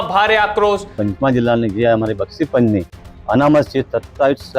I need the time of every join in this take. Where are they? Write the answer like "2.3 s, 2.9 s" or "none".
1.0 s